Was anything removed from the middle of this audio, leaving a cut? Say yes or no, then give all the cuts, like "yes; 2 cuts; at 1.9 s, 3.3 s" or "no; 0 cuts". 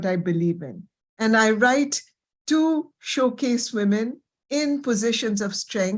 no; 0 cuts